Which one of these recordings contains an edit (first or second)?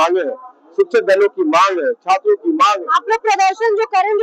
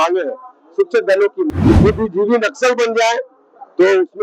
second